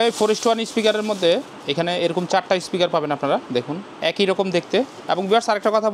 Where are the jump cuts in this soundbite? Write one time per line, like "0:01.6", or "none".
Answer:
0:03.8
0:05.0